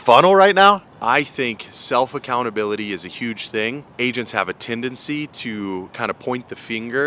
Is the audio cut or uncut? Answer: cut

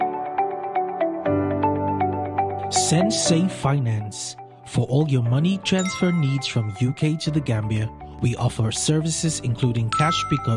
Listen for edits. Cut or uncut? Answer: uncut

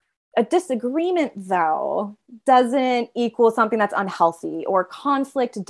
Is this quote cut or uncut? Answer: uncut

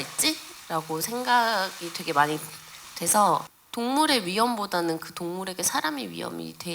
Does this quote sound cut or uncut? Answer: cut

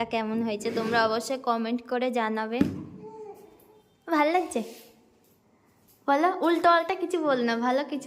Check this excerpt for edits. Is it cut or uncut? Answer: uncut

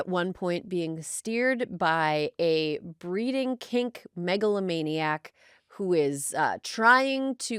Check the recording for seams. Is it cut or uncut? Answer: uncut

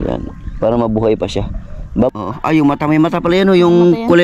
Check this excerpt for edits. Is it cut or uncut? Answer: cut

